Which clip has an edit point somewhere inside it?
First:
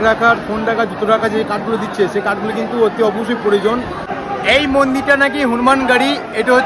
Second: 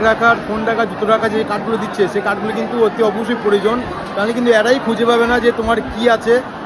first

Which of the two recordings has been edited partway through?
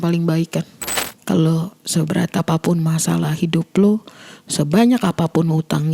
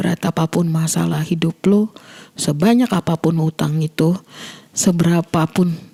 first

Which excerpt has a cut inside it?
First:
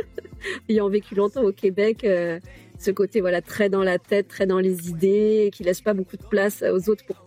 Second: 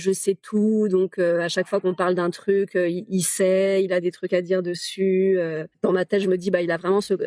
second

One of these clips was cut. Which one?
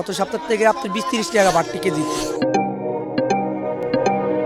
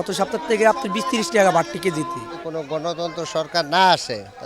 second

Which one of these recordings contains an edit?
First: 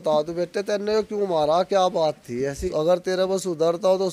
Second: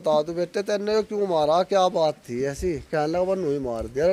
first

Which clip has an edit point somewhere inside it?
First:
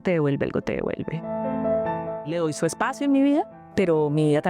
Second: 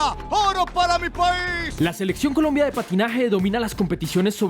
second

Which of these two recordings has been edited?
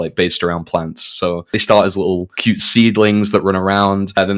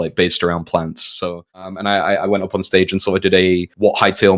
second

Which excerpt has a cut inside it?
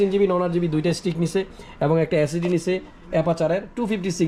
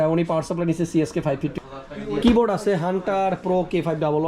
second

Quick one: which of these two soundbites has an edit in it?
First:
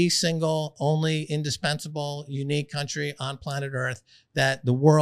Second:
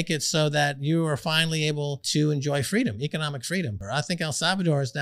second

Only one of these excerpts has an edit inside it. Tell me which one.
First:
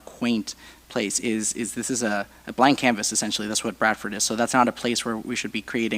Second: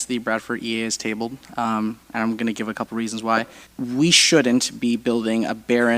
second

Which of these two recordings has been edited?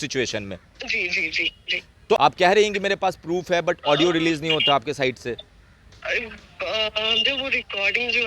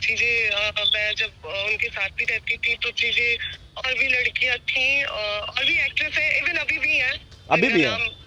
first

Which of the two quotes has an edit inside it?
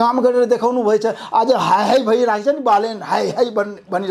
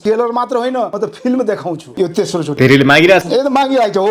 second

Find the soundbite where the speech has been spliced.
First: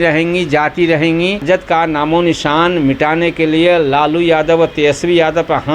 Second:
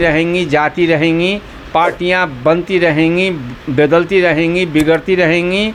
first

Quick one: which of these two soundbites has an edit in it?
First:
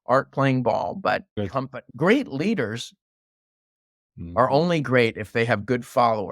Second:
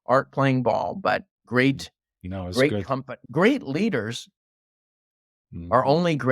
first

